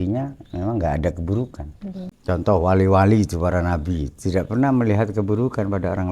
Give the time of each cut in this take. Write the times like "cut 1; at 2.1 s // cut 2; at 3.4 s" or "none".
cut 1; at 2.1 s